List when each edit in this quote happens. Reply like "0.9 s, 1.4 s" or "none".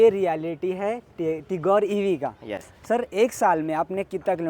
none